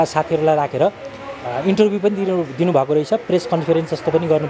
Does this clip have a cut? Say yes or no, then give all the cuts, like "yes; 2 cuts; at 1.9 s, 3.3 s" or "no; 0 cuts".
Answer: no; 0 cuts